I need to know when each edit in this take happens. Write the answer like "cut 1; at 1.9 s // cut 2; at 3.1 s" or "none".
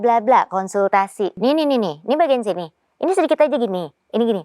cut 1; at 1.3 s